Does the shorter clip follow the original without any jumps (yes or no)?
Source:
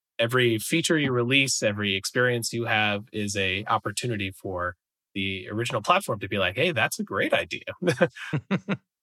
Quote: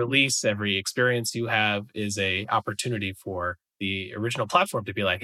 no